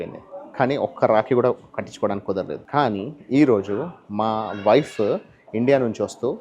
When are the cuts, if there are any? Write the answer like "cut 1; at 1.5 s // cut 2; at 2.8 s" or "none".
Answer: cut 1; at 2.6 s